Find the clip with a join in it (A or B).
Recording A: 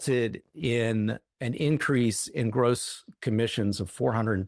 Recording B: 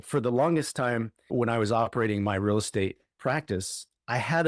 B